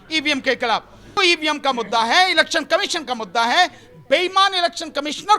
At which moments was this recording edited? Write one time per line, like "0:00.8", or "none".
0:01.2